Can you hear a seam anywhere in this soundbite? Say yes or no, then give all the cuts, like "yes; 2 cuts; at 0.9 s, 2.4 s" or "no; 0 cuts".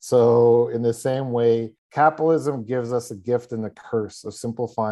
yes; 1 cut; at 1.8 s